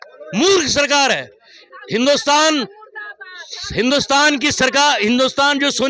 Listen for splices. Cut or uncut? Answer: uncut